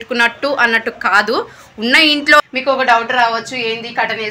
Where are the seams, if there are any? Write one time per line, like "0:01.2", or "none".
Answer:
0:02.4